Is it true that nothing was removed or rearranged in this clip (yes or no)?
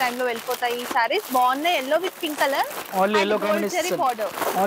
yes